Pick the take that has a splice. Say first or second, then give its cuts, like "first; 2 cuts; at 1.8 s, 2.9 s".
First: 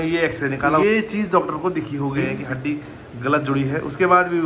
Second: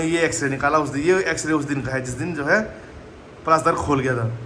first; 2 cuts; at 0.8 s, 2.4 s